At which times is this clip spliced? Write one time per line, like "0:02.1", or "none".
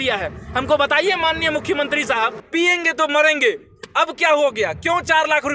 0:02.4